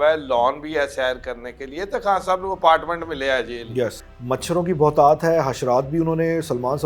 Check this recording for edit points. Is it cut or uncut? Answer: cut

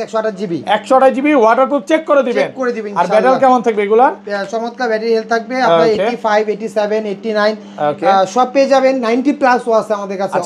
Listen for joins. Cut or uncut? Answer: uncut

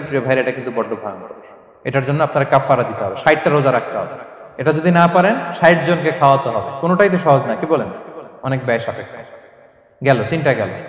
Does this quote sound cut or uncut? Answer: uncut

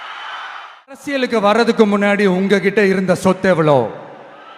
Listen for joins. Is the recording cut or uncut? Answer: cut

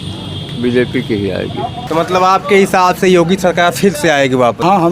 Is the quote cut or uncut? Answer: cut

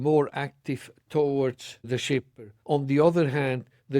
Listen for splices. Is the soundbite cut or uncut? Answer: cut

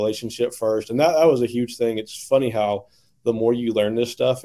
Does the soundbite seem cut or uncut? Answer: uncut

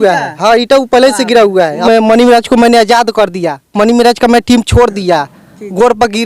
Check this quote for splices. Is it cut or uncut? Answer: cut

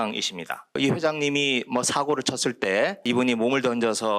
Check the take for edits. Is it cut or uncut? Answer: cut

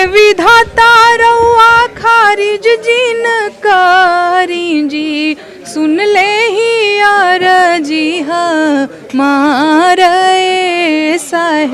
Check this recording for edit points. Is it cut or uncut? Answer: uncut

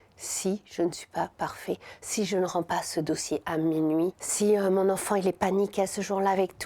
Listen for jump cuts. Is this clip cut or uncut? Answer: cut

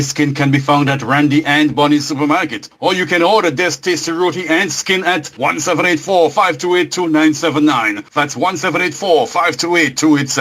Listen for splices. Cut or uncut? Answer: uncut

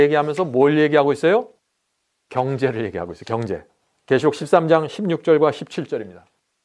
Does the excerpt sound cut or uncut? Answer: uncut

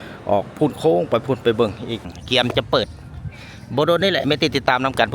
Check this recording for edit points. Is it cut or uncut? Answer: cut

